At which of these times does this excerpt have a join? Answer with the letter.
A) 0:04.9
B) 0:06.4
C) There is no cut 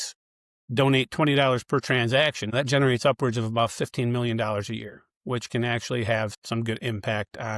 B